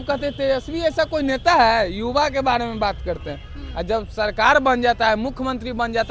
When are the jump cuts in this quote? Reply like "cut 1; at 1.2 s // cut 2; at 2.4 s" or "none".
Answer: none